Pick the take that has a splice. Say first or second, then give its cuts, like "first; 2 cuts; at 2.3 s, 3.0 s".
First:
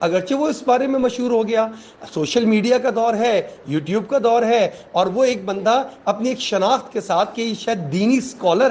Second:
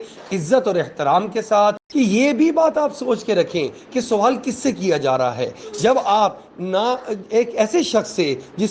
second; 1 cut; at 1.8 s